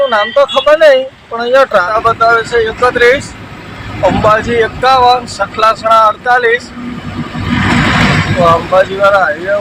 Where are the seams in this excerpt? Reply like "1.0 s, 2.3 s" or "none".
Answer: 1.9 s